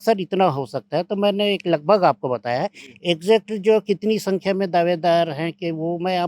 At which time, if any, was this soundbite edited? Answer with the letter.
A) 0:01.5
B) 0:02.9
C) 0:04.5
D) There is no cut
D